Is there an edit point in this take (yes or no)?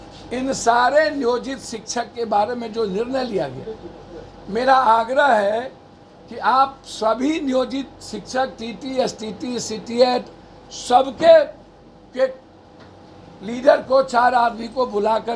no